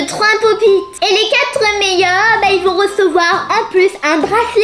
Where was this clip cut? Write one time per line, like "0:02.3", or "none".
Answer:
0:00.9